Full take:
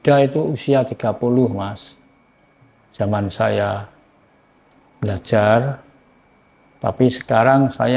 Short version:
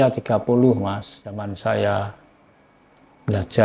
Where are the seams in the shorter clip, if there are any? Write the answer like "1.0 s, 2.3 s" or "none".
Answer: 1.5 s

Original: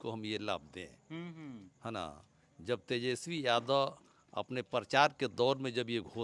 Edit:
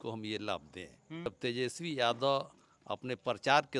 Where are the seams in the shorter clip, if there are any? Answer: 1.3 s

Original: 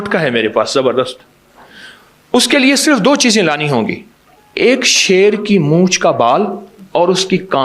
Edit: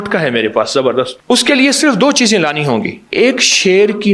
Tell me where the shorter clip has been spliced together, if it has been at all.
1.2 s, 3.0 s

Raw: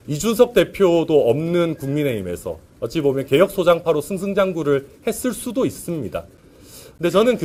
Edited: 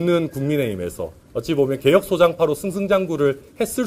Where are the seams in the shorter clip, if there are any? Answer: none

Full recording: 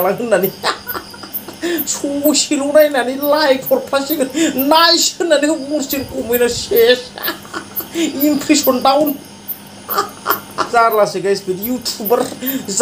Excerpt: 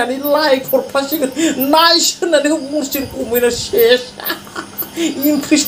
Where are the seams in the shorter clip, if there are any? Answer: none

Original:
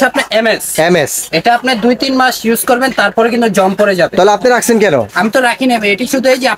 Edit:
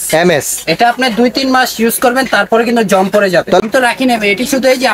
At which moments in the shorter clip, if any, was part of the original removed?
3.6 s

